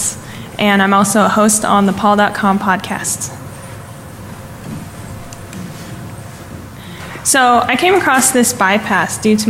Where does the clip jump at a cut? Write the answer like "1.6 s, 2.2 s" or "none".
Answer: 5.4 s